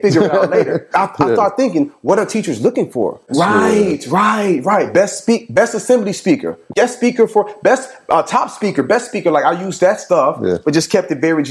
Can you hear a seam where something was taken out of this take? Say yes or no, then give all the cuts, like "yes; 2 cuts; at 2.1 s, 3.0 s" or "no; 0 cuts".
yes; 2 cuts; at 3.2 s, 6.7 s